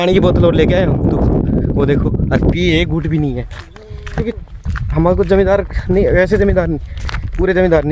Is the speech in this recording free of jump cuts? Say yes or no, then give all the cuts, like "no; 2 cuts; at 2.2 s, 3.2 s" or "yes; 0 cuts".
yes; 0 cuts